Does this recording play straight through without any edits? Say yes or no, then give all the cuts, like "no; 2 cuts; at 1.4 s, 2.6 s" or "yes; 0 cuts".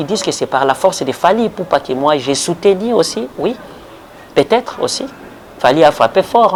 yes; 0 cuts